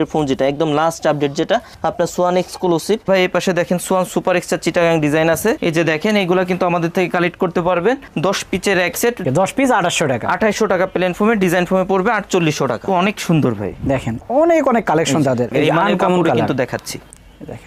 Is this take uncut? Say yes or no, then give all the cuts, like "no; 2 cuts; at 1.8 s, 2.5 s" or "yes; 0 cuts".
no; 5 cuts; at 3.1 s, 5.6 s, 9.2 s, 12.9 s, 15.5 s